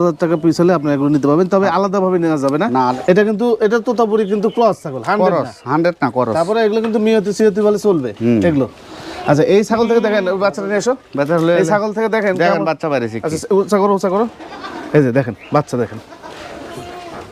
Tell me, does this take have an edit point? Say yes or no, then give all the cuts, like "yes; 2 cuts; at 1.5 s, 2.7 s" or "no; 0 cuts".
yes; 1 cut; at 3.0 s